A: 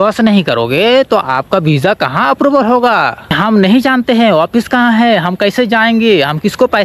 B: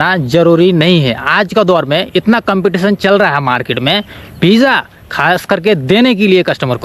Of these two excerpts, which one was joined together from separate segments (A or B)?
A